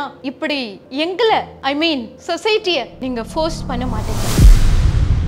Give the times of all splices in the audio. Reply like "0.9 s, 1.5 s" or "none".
4.3 s